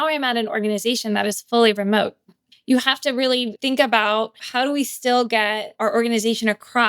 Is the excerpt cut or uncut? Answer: cut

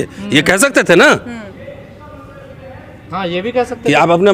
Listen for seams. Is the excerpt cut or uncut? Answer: uncut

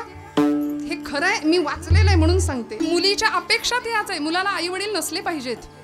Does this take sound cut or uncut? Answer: uncut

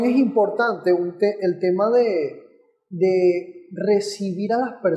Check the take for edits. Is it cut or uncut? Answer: uncut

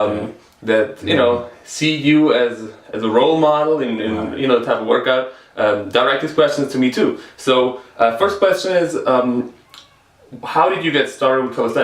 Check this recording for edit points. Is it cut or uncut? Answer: cut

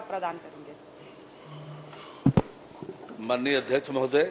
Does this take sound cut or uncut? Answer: uncut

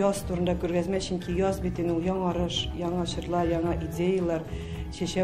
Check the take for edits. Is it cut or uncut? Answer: uncut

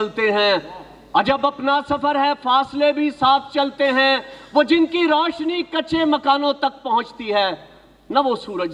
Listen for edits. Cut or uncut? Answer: uncut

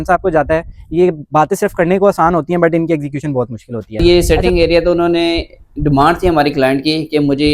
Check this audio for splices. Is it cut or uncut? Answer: cut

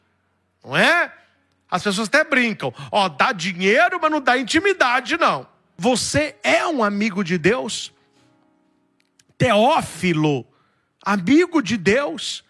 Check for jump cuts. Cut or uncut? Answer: cut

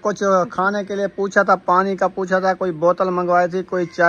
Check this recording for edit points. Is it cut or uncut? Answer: uncut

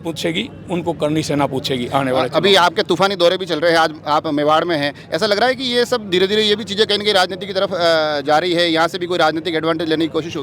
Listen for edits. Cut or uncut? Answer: uncut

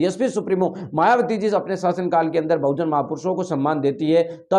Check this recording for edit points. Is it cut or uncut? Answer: uncut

